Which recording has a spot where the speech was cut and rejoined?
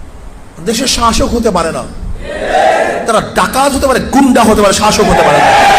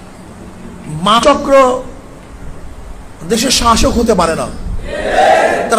second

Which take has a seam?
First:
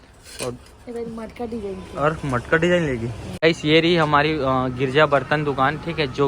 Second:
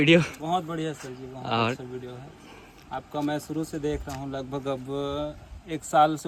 first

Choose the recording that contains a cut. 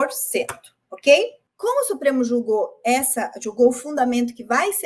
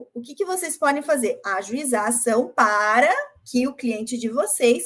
first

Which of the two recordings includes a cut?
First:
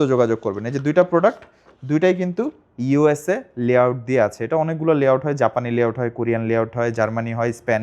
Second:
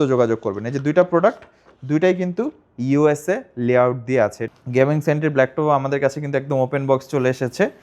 second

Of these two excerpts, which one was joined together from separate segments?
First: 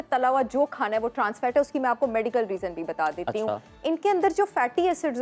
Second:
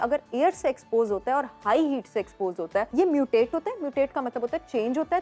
second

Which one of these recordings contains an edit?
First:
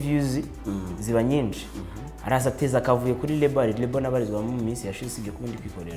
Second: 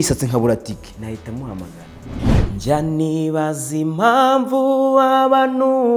second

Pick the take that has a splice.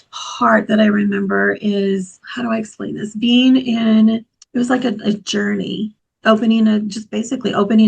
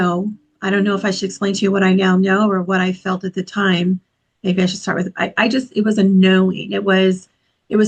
first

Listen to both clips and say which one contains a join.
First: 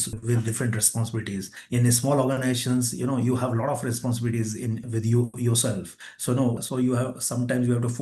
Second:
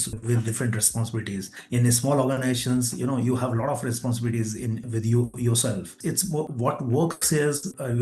second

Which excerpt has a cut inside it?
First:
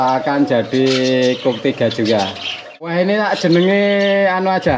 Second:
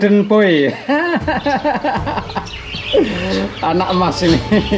first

